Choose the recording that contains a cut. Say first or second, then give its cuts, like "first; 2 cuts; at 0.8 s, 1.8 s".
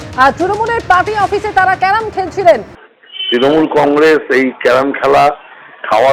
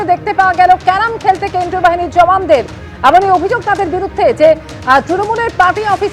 first; 1 cut; at 2.7 s